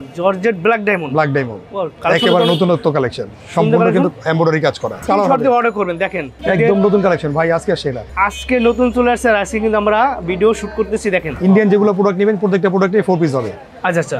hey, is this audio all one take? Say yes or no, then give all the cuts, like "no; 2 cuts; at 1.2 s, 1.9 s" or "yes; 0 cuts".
no; 4 cuts; at 5.0 s, 6.3 s, 8.0 s, 11.3 s